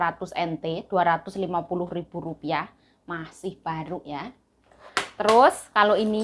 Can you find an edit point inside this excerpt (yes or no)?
no